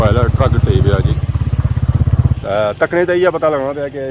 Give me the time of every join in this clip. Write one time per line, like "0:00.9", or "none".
0:02.3

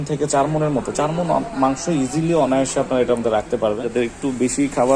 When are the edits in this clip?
0:03.8

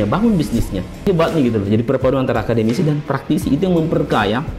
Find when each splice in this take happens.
0:01.0

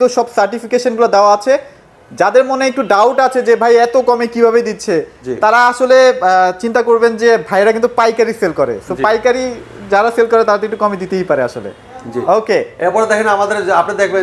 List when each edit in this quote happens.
none

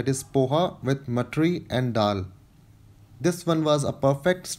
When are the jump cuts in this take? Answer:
none

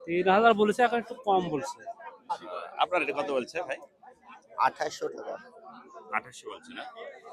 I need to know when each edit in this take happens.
0:02.3

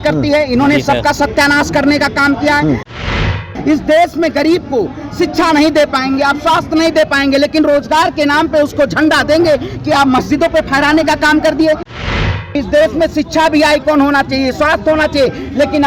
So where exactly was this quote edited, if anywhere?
0:03.2
0:12.0

